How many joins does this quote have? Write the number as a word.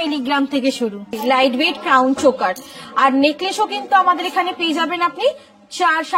one